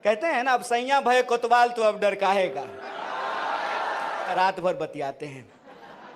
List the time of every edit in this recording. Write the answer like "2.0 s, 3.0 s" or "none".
4.3 s